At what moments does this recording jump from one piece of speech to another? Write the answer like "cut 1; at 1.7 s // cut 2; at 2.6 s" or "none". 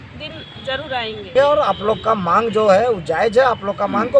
cut 1; at 1.3 s